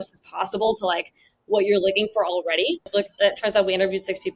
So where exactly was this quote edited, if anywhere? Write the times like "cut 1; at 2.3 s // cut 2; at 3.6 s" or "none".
cut 1; at 2.9 s